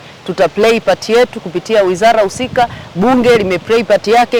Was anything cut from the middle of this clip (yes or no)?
no